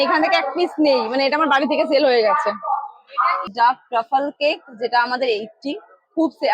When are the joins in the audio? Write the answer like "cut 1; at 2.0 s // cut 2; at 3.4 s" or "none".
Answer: cut 1; at 3.5 s